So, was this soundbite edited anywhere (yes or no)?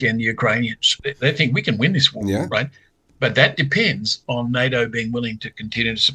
yes